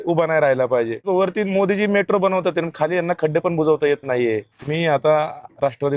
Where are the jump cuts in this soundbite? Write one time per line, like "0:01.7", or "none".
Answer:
0:01.1
0:04.6